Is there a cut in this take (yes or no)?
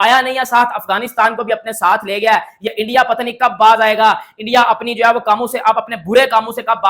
no